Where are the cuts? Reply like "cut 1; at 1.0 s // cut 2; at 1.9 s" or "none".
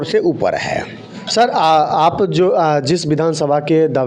none